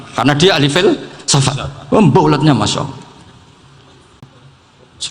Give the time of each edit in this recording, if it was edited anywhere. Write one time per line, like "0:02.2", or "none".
0:04.2